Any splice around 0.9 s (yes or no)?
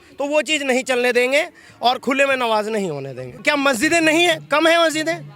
no